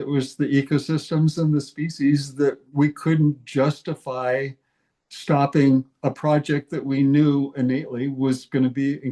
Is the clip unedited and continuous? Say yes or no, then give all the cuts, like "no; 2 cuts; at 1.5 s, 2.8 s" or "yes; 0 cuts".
yes; 0 cuts